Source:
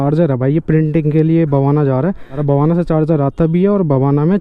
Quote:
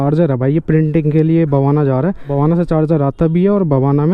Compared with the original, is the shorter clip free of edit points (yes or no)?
no